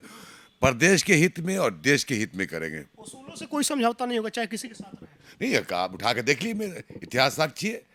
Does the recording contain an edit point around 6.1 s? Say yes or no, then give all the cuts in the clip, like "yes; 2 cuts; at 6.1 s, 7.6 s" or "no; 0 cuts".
no; 0 cuts